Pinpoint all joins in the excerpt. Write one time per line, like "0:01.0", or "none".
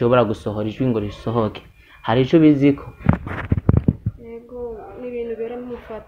none